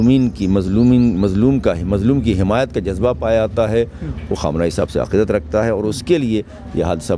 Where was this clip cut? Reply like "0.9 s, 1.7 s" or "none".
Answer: none

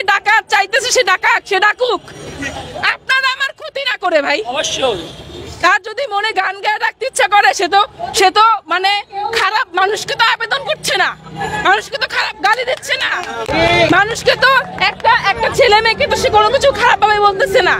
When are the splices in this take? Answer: none

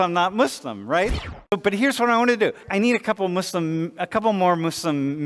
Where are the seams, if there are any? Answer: 1.3 s, 2.6 s

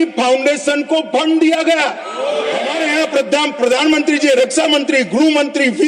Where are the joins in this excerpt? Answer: 2.7 s

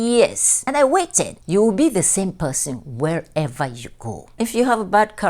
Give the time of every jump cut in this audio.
1.0 s, 4.3 s

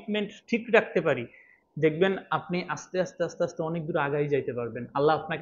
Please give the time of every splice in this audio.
none

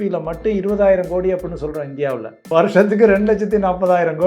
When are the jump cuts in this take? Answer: 2.3 s

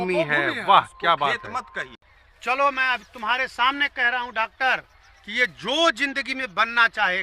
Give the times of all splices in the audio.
2.0 s

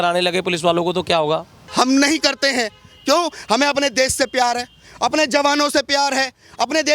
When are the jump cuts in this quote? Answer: 1.6 s

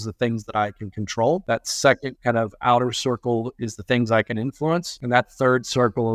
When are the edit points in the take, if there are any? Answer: 1.4 s, 4.9 s

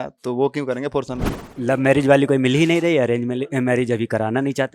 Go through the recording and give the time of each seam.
1.5 s

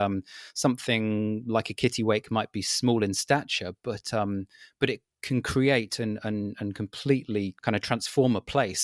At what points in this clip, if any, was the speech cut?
7.6 s

